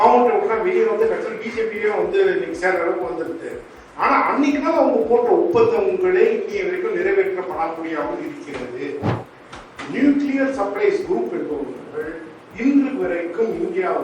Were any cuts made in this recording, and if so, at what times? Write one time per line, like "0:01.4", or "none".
none